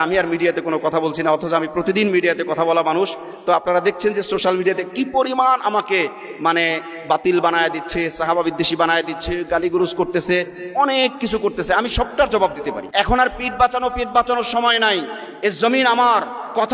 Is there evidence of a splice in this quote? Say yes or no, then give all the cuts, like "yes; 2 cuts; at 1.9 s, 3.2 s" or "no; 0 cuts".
yes; 1 cut; at 12.8 s